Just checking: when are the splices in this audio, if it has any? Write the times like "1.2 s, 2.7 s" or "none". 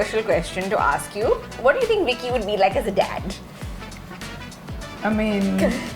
1.5 s